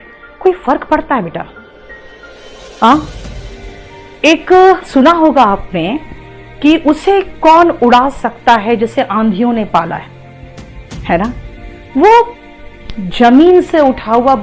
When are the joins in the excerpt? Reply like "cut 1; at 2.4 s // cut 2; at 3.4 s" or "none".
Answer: none